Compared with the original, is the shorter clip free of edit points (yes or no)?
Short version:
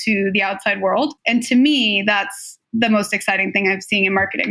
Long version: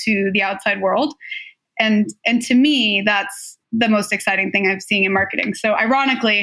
no